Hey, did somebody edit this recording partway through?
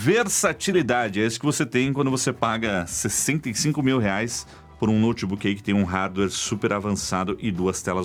no; 0 cuts

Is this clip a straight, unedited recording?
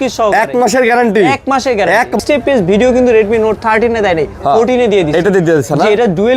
no; 1 cut; at 2.2 s

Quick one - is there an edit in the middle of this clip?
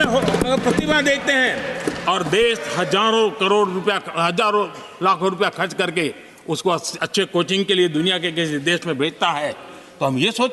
no; 0 cuts

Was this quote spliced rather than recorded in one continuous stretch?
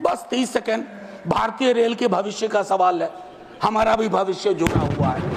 no; 0 cuts

